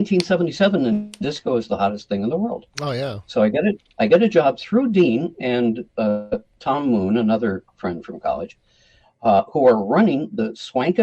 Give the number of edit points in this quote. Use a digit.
0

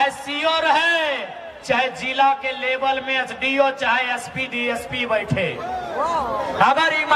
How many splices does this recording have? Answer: 0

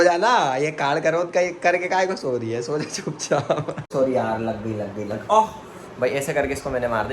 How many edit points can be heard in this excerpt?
1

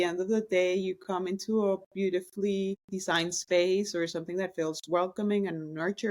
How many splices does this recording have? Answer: 1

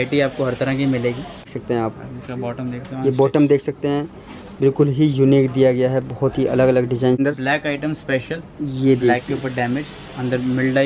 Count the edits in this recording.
2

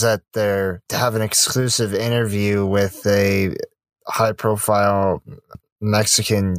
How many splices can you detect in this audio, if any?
1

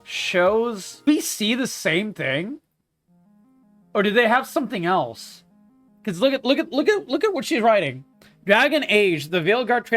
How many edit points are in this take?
1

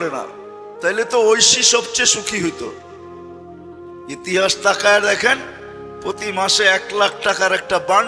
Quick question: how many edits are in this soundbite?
2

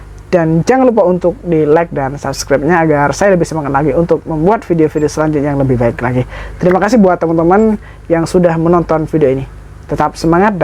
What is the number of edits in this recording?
0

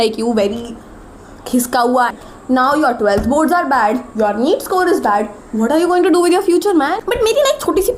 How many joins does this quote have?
2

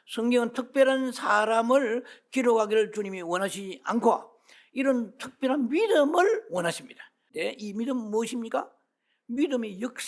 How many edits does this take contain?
1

